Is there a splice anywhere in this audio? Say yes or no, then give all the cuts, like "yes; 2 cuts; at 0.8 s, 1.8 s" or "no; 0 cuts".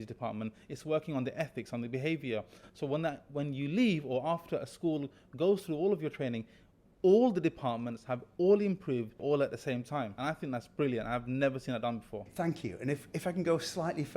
yes; 2 cuts; at 9.2 s, 10.1 s